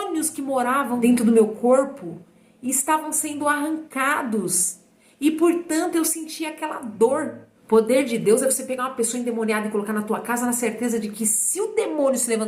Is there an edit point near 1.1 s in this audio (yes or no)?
yes